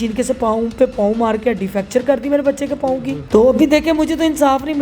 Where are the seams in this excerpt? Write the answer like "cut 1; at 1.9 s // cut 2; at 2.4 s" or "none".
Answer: cut 1; at 3.2 s